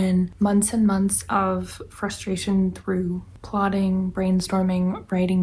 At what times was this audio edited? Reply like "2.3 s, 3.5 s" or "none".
none